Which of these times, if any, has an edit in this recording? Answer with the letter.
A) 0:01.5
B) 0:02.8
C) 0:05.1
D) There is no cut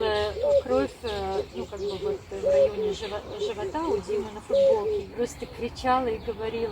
C